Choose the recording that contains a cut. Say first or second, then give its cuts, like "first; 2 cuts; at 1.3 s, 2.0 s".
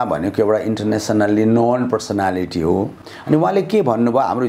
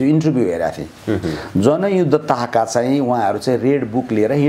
first; 1 cut; at 2.9 s